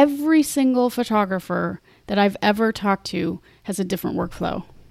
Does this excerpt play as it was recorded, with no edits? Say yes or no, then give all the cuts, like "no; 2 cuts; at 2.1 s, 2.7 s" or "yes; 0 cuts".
yes; 0 cuts